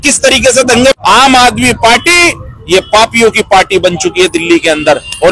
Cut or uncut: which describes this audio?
cut